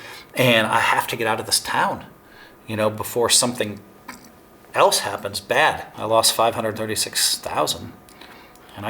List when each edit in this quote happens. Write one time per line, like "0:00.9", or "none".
0:05.9